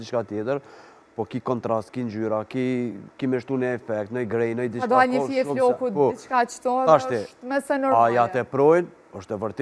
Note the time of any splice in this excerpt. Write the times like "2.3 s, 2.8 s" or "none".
none